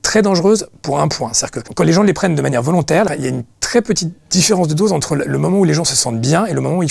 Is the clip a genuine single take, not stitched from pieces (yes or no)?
yes